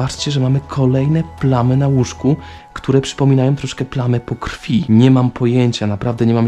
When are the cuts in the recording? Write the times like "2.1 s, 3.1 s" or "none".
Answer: none